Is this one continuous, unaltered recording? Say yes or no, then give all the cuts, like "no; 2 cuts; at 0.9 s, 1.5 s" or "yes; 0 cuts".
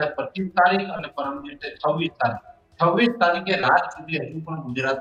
yes; 0 cuts